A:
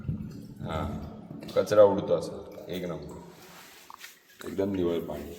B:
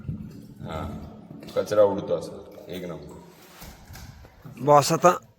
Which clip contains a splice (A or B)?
B